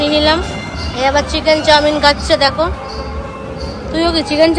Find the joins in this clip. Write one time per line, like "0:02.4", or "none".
none